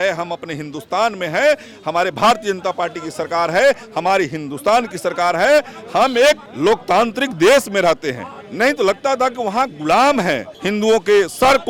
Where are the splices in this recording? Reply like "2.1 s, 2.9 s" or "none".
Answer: 6.5 s, 10.5 s